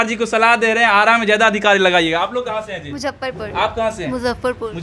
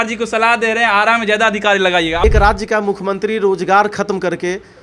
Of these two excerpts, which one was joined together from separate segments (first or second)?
second